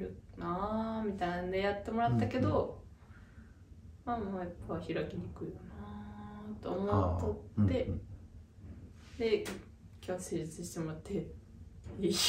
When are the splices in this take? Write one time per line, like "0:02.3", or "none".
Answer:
none